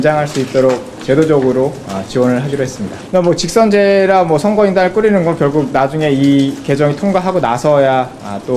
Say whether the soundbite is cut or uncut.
cut